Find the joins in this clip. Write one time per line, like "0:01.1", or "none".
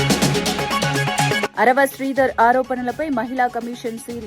0:01.5